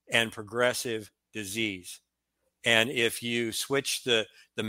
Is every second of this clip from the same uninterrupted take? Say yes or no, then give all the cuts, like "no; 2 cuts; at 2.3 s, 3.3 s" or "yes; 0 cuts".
yes; 0 cuts